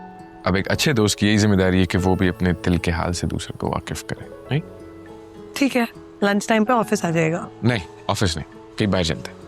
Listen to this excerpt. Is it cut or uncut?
uncut